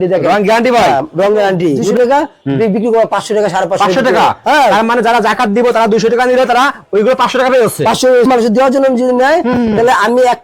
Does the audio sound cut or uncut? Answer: cut